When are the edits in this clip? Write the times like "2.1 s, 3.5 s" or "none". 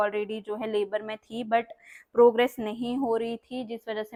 none